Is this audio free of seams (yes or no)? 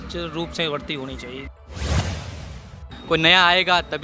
no